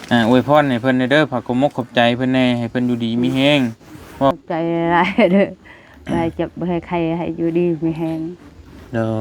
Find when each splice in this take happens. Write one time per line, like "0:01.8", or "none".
0:04.3